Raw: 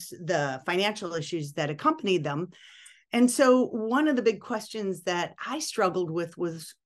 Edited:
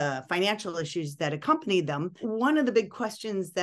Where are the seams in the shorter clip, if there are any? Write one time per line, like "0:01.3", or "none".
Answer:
0:02.3